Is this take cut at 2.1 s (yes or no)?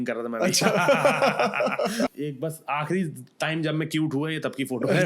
yes